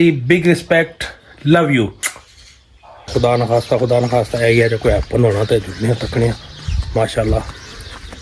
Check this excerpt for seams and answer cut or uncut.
cut